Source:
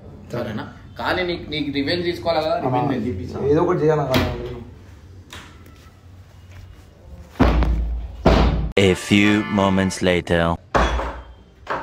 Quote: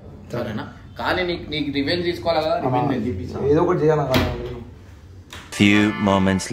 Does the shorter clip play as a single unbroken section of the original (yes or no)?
no